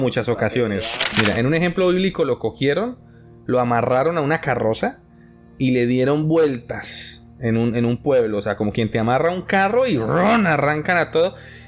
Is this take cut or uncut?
cut